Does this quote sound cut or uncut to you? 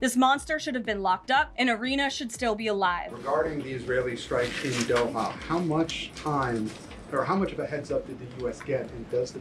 cut